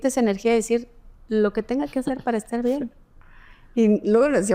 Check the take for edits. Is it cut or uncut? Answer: uncut